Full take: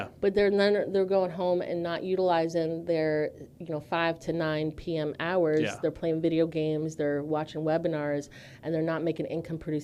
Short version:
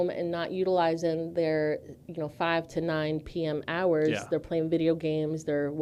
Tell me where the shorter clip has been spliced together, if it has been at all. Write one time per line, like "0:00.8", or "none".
none